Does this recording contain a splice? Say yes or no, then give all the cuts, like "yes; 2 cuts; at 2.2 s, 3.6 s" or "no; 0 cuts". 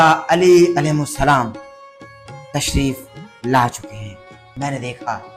yes; 1 cut; at 4.4 s